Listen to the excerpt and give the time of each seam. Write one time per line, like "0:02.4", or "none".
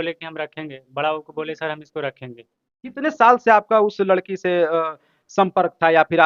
none